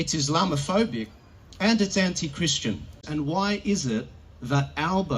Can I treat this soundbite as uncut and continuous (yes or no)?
no